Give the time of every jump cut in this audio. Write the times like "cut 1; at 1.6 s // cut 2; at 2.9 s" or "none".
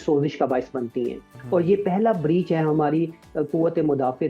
none

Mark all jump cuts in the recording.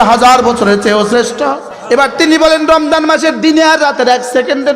cut 1; at 1.7 s

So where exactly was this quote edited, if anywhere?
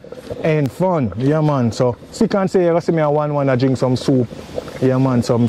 none

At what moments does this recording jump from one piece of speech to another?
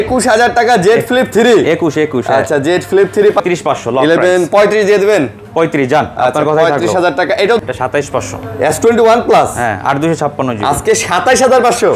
cut 1; at 3.4 s // cut 2; at 7.6 s

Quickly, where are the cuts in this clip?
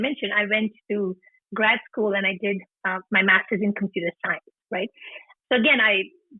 cut 1; at 5.2 s

